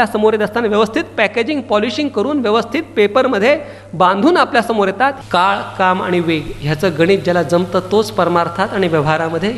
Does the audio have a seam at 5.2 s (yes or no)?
yes